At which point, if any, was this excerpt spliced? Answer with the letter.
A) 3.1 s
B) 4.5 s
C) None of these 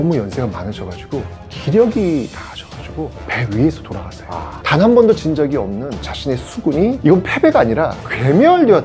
B